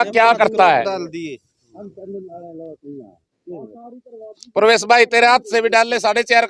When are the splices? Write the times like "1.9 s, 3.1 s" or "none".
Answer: none